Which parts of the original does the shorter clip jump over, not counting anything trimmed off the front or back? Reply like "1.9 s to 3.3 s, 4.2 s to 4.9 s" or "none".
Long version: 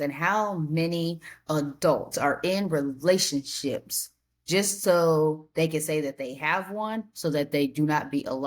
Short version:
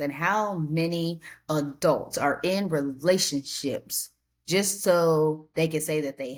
none